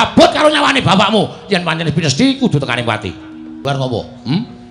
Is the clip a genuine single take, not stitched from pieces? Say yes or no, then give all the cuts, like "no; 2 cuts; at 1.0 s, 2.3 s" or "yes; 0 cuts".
no; 1 cut; at 3.6 s